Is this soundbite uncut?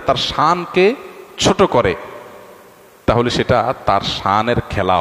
yes; 0 cuts

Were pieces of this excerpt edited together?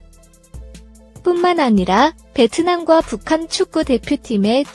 yes; 1 cut; at 1.2 s

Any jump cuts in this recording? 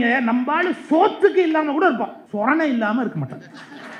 yes; 1 cut; at 2.2 s

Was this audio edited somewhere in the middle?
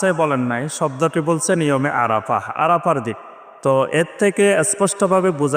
no; 0 cuts

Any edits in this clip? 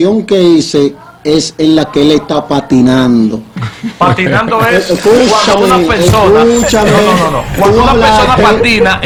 no; 0 cuts

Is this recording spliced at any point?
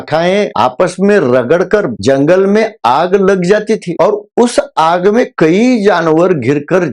no; 0 cuts

